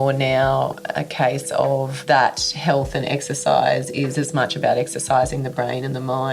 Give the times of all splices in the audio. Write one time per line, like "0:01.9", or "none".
0:02.0